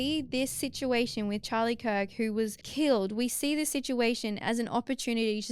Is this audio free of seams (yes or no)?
no